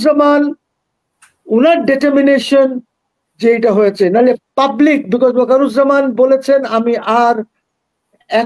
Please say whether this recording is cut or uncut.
uncut